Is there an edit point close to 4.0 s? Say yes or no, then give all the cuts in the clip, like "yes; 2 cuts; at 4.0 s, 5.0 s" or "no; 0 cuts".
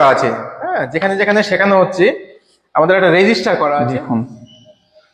yes; 1 cut; at 4.0 s